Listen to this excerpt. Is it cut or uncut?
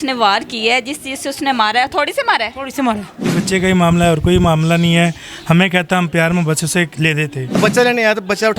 cut